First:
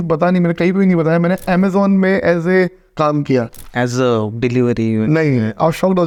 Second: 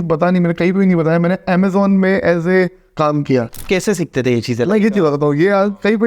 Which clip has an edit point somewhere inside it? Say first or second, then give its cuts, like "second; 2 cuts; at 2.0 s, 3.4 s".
second; 1 cut; at 3.6 s